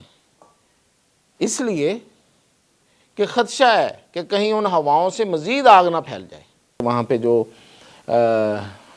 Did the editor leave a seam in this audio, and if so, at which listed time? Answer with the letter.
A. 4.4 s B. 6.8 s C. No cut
B